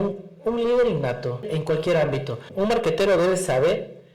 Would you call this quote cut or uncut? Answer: cut